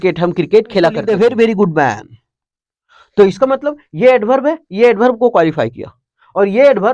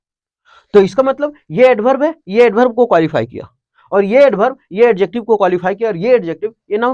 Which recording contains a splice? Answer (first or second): first